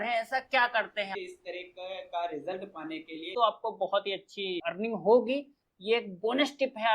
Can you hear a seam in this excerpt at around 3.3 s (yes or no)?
yes